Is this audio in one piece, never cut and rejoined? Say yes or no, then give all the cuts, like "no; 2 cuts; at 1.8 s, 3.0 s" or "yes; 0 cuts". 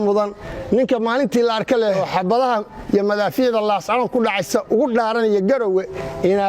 no; 1 cut; at 2.0 s